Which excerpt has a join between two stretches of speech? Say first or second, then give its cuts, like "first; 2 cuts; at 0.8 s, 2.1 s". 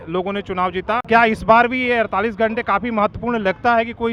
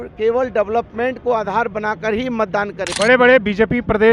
second; 1 cut; at 2.8 s